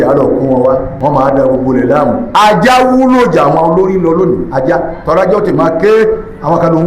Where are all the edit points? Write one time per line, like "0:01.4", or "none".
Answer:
0:00.9